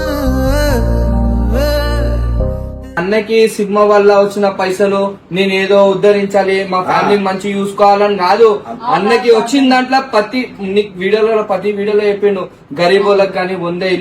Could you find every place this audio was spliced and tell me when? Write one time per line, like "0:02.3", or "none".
0:03.0